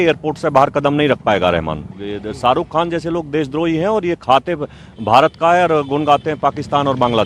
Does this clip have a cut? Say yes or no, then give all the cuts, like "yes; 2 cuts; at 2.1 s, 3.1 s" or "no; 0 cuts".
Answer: yes; 1 cut; at 2.0 s